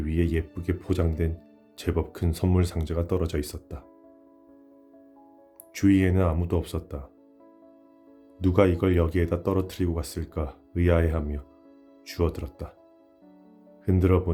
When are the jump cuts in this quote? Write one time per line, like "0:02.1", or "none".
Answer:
none

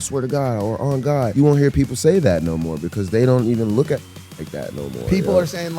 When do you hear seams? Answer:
0:01.3

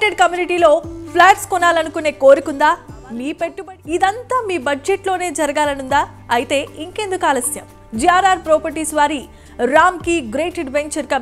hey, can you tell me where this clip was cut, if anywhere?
0:03.6

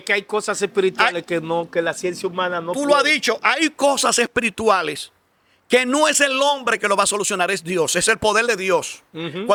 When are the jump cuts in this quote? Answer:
none

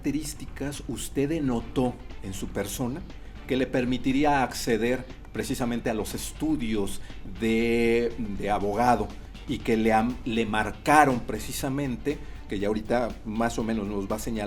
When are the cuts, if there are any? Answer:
none

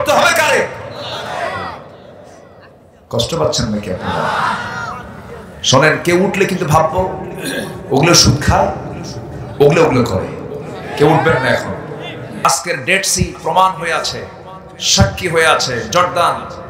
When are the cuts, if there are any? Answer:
0:12.4

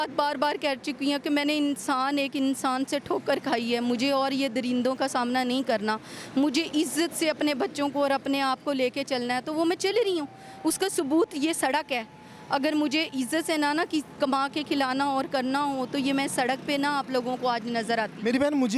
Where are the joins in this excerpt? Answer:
none

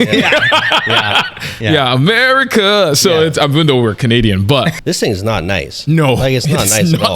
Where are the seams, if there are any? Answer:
0:04.8

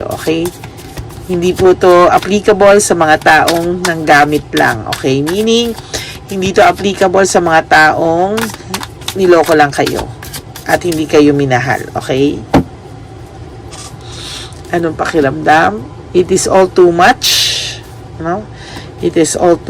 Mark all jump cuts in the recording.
none

